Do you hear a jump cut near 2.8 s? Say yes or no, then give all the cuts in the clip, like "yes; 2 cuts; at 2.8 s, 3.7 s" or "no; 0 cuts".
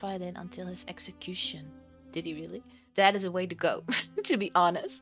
yes; 1 cut; at 2.8 s